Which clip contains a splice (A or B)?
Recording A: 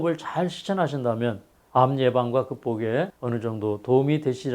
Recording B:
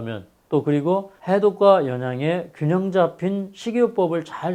A